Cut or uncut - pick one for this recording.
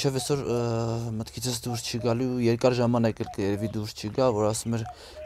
uncut